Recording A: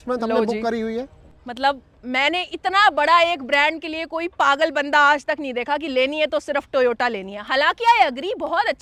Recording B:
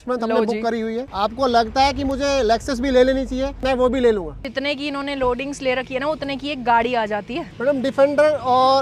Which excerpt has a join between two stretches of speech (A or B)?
B